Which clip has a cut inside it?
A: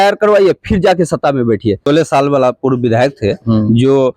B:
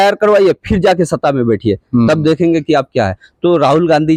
A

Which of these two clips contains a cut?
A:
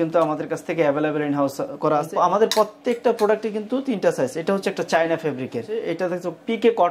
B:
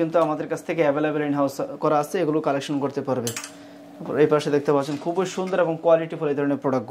A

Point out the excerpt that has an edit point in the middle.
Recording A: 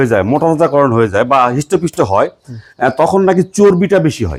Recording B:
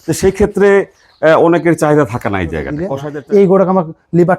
B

